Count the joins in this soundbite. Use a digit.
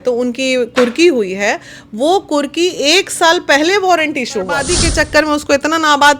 1